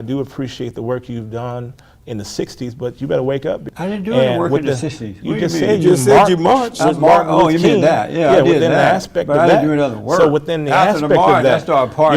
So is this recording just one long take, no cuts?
no; 1 cut; at 3.7 s

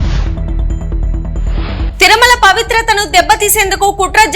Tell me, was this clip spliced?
no; 0 cuts

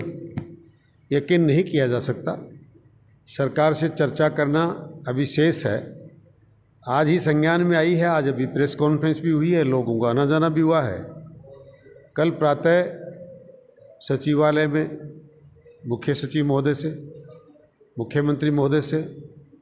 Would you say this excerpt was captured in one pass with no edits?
yes; 0 cuts

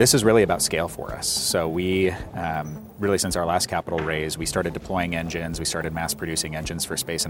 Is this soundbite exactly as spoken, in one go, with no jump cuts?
yes; 0 cuts

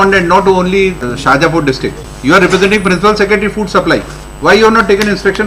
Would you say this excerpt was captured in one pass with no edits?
no; 2 cuts; at 1.1 s, 2.1 s

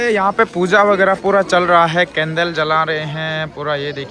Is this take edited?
no; 0 cuts

